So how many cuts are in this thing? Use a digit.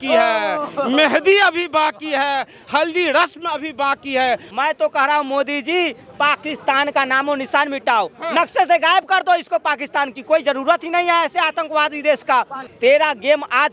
2